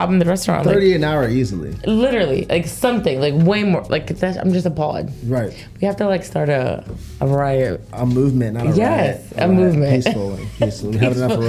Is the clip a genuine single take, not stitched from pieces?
yes; 0 cuts

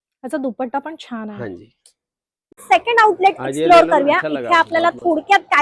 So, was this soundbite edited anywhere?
yes; 1 cut; at 2.6 s

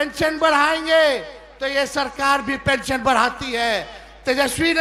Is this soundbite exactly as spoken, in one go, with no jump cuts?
yes; 0 cuts

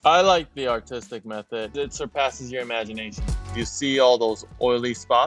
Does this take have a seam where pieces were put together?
yes; 2 cuts; at 1.7 s, 3.3 s

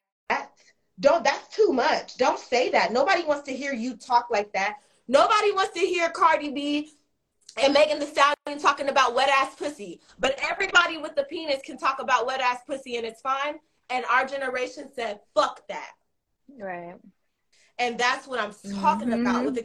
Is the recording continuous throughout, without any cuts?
yes; 0 cuts

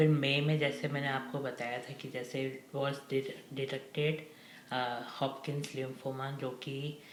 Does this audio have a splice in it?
no; 0 cuts

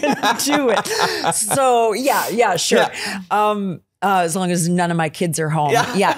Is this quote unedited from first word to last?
yes; 0 cuts

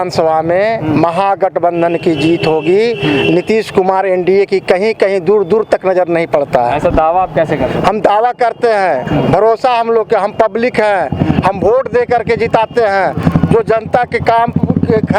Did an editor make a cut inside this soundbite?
no; 0 cuts

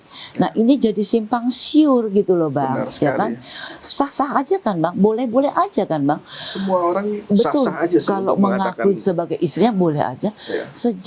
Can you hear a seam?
no; 0 cuts

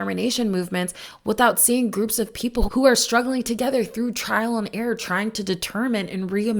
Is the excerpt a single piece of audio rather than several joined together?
yes; 0 cuts

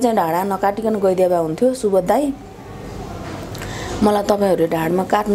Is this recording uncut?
yes; 0 cuts

